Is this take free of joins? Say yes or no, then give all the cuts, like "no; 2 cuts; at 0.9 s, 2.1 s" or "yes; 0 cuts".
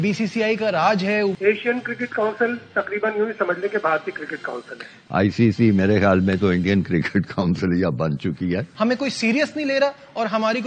no; 3 cuts; at 1.4 s, 5.0 s, 8.7 s